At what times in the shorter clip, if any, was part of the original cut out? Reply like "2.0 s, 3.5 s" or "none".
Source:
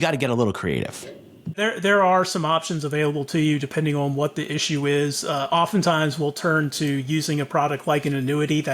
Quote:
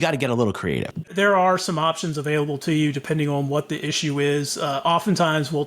1.1 s